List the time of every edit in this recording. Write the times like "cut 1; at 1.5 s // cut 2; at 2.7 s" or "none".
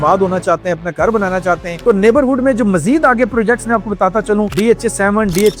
cut 1; at 1.8 s // cut 2; at 4.5 s